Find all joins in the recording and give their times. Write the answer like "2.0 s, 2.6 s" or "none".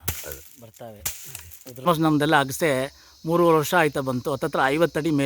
1.9 s

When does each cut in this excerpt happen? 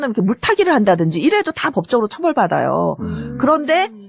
2.5 s

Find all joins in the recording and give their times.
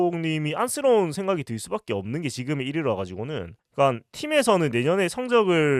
none

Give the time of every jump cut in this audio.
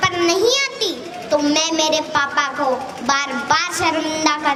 none

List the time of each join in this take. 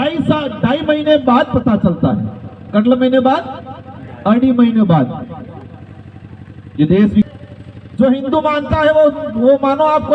7.3 s

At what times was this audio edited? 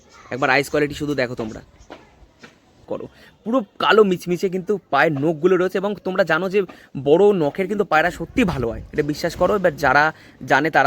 2.8 s

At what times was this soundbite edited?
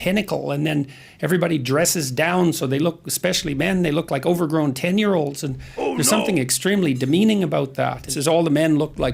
8.1 s

